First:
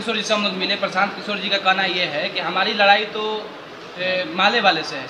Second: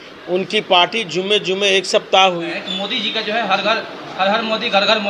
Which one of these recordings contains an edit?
second; 1 cut; at 2.5 s

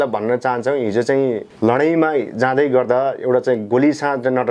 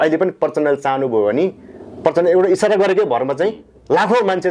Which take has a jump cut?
first; 1 cut; at 1.5 s

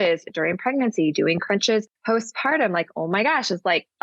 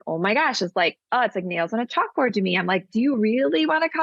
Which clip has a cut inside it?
first; 1 cut; at 1.9 s

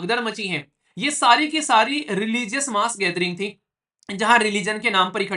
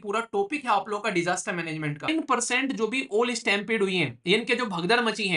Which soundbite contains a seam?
second; 1 cut; at 2.1 s

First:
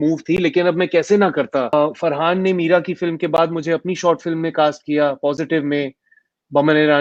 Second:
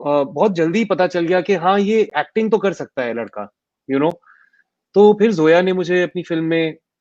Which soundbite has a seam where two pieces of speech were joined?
first; 1 cut; at 1.7 s

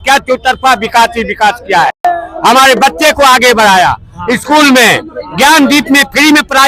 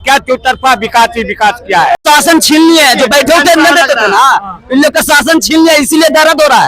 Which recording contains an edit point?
second; 1 cut; at 2.0 s

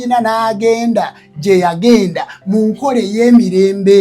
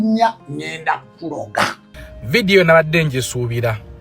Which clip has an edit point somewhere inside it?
second; 1 cut; at 1.9 s

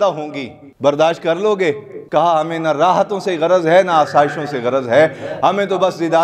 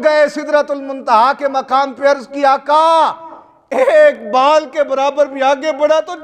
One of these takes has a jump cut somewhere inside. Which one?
first; 1 cut; at 1.9 s

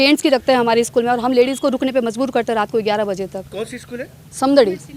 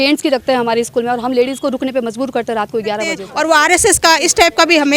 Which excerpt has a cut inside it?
second; 1 cut; at 3.2 s

